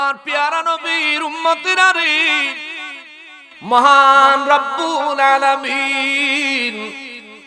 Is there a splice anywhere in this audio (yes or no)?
no